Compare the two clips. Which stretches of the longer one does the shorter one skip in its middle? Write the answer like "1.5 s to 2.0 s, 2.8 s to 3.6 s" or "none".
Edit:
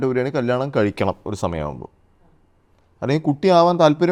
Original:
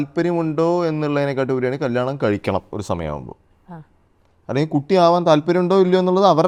none